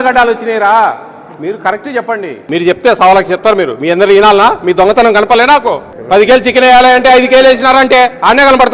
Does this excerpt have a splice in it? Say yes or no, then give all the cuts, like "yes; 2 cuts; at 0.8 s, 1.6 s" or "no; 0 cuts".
yes; 2 cuts; at 2.3 s, 5.9 s